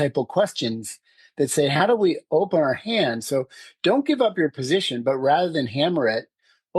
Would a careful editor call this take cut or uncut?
uncut